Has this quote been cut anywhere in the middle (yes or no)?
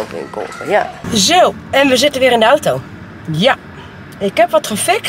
yes